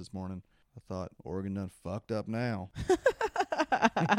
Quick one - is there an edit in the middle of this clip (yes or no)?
yes